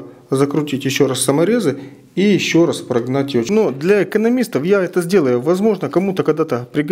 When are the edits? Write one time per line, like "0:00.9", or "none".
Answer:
0:03.5

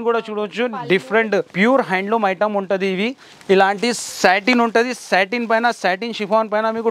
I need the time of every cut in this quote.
0:01.5
0:03.3

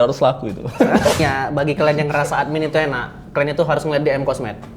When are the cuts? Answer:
0:01.2

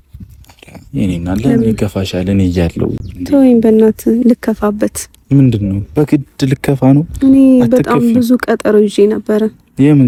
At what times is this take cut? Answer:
none

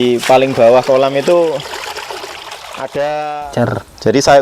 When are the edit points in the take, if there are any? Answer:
0:03.4

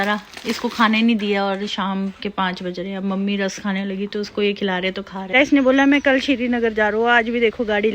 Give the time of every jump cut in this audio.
0:05.3

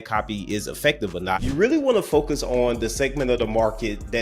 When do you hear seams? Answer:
0:01.4

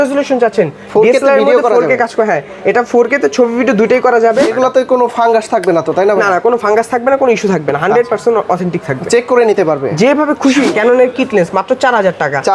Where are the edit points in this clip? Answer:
0:04.5
0:10.7

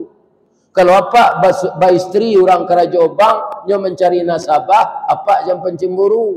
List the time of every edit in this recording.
none

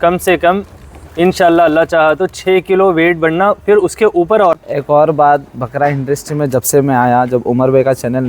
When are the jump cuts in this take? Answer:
0:04.5

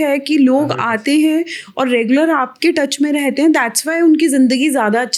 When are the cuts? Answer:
none

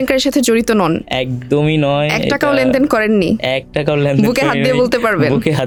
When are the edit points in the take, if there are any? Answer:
none

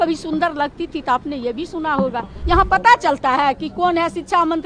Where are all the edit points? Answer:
0:02.3

